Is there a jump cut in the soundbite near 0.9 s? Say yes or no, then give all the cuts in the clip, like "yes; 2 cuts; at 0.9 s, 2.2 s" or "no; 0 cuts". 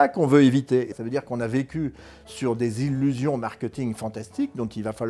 yes; 1 cut; at 0.9 s